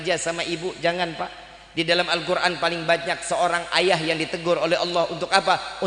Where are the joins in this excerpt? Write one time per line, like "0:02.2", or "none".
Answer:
none